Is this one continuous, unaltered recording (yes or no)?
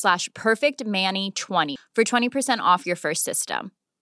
no